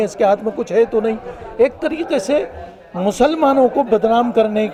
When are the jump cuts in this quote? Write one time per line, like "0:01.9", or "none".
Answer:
none